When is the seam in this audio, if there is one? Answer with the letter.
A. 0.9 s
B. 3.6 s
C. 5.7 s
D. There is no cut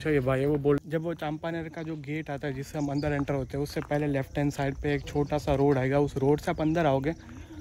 A